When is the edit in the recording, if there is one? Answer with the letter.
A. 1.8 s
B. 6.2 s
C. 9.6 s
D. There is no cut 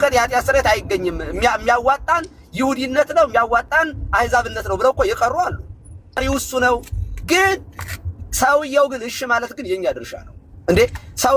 B